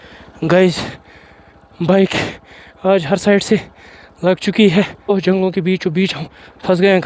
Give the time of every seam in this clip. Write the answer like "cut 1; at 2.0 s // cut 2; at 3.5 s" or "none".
cut 1; at 5.1 s